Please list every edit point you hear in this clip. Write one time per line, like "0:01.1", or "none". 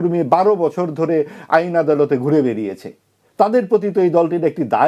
none